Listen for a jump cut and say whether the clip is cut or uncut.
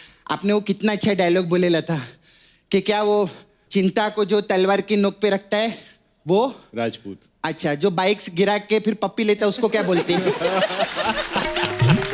uncut